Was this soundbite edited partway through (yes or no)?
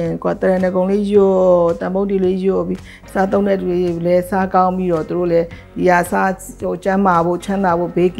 no